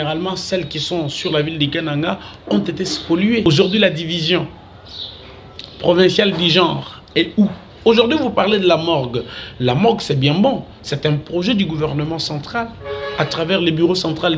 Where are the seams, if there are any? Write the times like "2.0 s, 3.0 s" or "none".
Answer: 3.4 s, 7.7 s